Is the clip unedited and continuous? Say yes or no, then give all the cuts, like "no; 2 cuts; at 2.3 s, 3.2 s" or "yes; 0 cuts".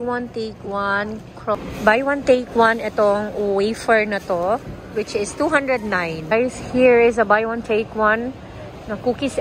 no; 2 cuts; at 1.5 s, 6.3 s